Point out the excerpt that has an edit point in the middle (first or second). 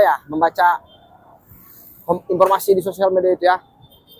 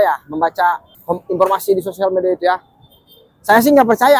second